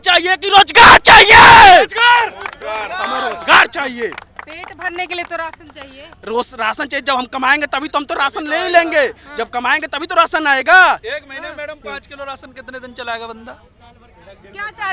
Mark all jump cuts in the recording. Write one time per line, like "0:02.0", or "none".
none